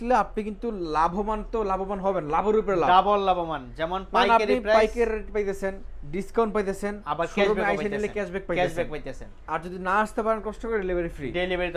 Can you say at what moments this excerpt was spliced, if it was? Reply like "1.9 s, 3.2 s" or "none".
none